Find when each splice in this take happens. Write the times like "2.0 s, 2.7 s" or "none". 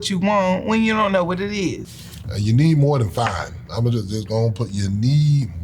1.9 s